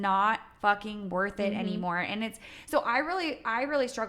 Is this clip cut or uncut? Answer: uncut